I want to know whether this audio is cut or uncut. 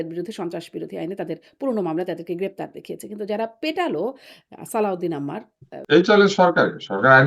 cut